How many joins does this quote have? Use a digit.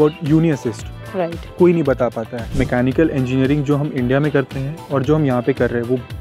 1